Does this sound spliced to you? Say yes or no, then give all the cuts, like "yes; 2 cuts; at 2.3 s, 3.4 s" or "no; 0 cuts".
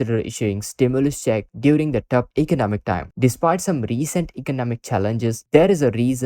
yes; 1 cut; at 3.1 s